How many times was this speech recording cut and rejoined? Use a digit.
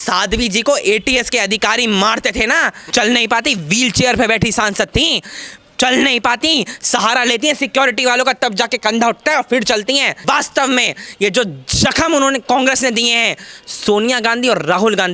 2